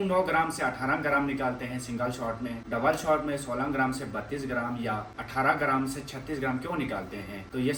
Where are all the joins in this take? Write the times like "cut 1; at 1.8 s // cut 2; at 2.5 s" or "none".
none